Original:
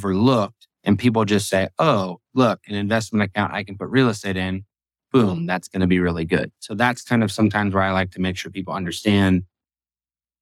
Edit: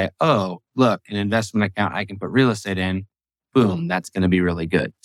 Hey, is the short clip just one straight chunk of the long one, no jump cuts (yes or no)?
yes